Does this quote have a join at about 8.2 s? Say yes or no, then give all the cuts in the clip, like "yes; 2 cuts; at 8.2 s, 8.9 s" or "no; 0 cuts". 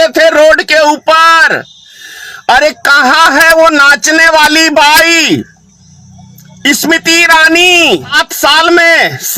yes; 1 cut; at 8.2 s